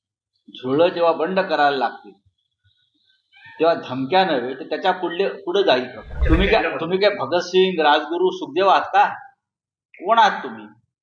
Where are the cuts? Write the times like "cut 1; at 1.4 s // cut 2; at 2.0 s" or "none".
cut 1; at 6.1 s

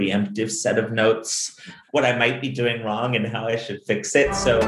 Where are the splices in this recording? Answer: cut 1; at 1.7 s

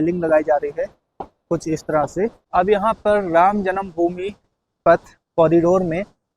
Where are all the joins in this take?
cut 1; at 2.4 s

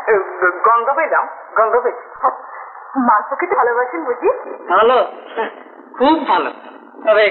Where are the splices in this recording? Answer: none

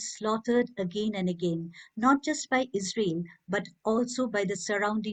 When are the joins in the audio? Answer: none

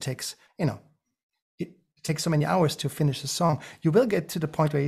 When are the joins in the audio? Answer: none

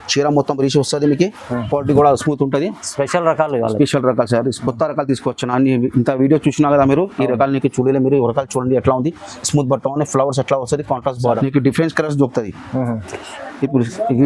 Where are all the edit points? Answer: cut 1; at 11.2 s

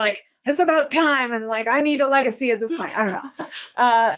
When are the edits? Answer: none

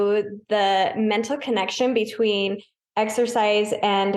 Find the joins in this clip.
none

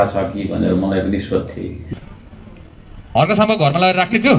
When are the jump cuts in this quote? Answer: cut 1; at 1.8 s

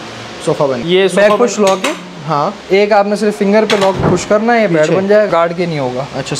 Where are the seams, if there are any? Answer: cut 1; at 0.8 s // cut 2; at 5.3 s

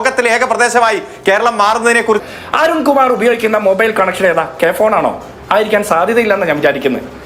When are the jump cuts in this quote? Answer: cut 1; at 2.2 s // cut 2; at 4.5 s

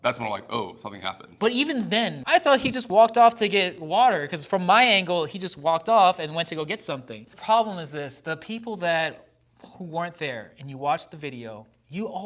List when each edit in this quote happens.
cut 1; at 2.2 s // cut 2; at 7.3 s

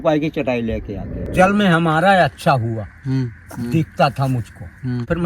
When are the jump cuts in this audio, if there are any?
cut 1; at 1.3 s

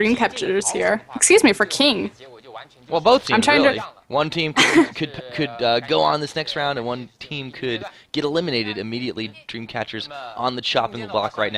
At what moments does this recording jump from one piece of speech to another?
none

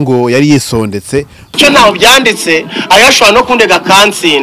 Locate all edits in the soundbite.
cut 1; at 1.6 s

